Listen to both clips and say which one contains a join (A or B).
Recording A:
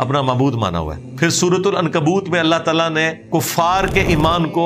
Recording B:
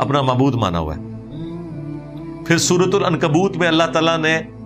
A